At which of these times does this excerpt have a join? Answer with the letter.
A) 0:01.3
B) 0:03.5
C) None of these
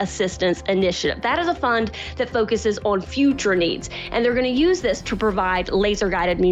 C